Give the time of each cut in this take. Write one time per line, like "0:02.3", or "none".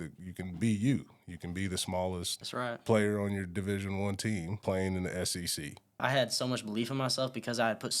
0:02.4
0:04.5
0:06.0